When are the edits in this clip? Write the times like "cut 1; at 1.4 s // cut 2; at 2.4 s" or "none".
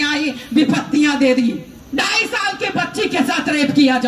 cut 1; at 1.8 s